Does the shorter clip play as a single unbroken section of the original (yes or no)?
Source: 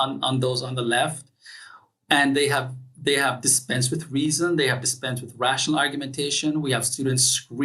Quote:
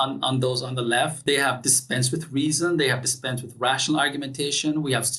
no